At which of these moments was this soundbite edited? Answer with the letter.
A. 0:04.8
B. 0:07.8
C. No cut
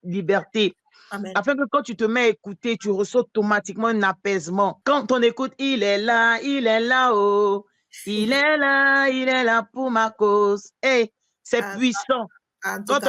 A